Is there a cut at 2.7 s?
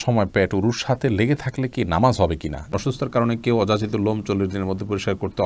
yes; 1 cut; at 2.7 s

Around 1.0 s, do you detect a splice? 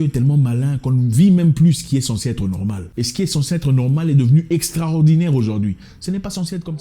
no; 1 cut; at 2.8 s

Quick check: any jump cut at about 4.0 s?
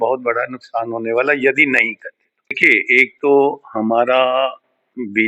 no; 1 cut; at 2.6 s

